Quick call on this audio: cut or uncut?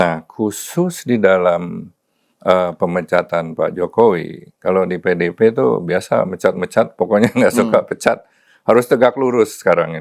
uncut